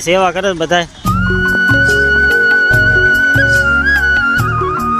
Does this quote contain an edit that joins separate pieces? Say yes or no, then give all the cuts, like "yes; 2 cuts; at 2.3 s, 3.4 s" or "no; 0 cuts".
yes; 1 cut; at 1.0 s